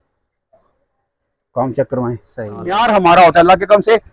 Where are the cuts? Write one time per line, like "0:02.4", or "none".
0:02.9